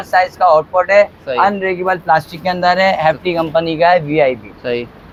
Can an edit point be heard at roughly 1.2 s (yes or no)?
no